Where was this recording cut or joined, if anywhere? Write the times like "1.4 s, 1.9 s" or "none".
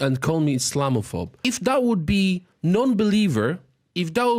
1.3 s